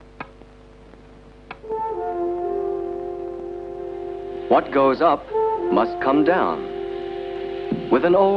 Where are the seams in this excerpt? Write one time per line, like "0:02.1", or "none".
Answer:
none